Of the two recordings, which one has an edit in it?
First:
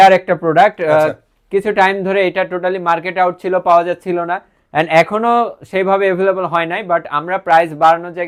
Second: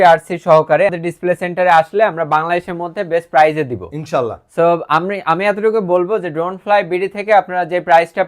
second; 1 cut; at 1.0 s

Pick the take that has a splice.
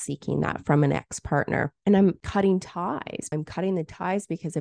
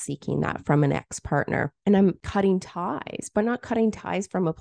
first; 1 cut; at 3.3 s

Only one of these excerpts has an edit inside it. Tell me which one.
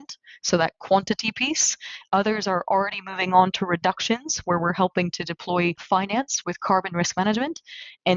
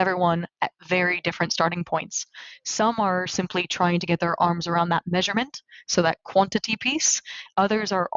first; 1 cut; at 6.0 s

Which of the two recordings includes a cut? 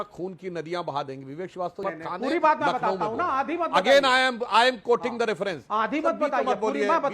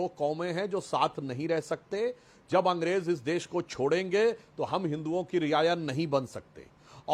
first; 2 cuts; at 1.8 s, 6.2 s

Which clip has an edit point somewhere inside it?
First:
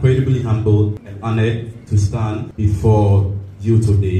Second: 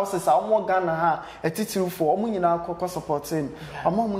first; 2 cuts; at 1.1 s, 2.5 s

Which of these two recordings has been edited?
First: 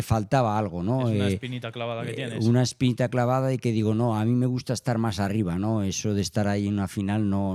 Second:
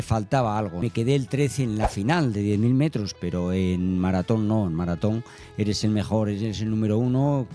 second; 2 cuts; at 0.8 s, 3.1 s

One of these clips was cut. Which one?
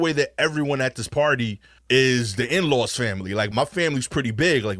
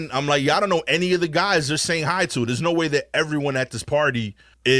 first; 1 cut; at 3.5 s

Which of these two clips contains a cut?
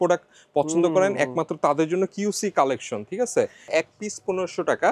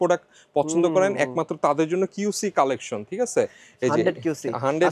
first; 1 cut; at 3.7 s

